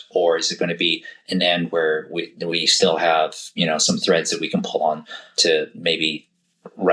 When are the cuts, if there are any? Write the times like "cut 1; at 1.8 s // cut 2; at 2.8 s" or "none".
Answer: none